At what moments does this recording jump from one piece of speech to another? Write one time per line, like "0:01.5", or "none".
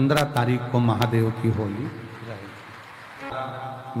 none